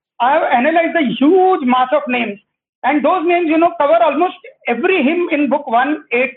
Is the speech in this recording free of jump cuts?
yes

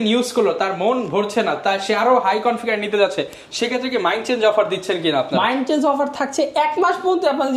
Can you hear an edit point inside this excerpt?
no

